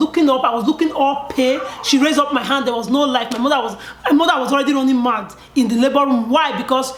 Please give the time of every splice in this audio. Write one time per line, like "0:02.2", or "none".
none